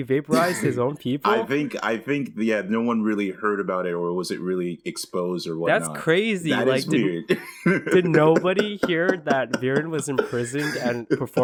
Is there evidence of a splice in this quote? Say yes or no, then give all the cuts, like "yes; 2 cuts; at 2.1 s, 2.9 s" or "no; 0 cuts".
no; 0 cuts